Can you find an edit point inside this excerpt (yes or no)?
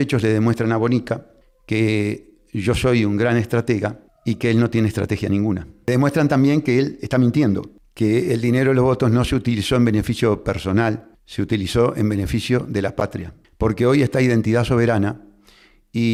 no